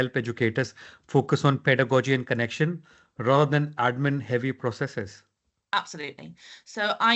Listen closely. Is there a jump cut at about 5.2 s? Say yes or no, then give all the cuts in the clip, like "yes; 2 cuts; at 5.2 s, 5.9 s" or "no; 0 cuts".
no; 0 cuts